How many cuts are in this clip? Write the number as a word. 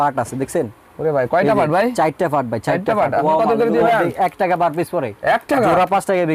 one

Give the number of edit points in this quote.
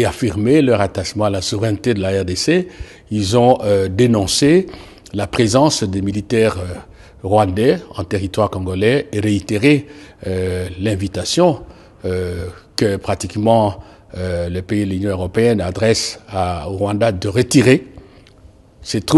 zero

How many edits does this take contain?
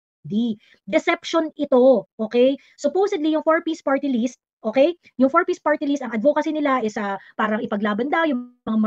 zero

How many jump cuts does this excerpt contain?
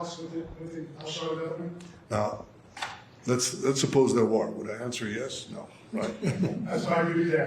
zero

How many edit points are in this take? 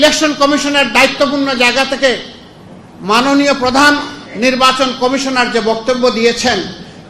zero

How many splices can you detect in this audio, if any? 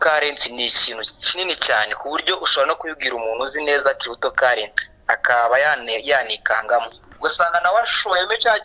one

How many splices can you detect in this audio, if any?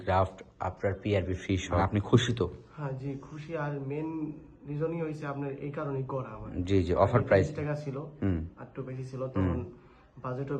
one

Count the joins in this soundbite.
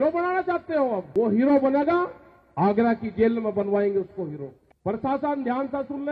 one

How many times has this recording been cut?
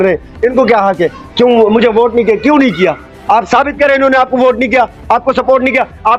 zero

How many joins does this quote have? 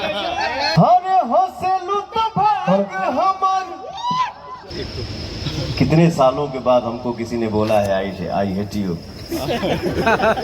two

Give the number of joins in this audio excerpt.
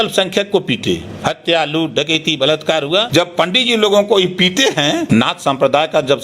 two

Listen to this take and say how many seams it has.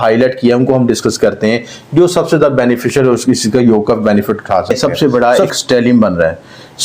one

